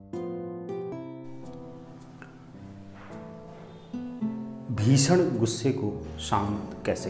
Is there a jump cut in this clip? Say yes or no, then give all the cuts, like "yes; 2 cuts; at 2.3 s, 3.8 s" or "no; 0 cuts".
yes; 1 cut; at 0.9 s